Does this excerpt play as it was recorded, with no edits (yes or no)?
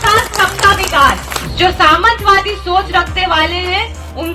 no